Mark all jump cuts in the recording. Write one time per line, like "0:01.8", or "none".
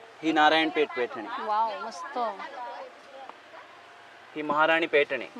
none